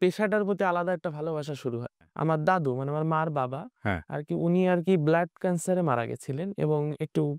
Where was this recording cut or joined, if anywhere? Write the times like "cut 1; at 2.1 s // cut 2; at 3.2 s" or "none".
cut 1; at 2.0 s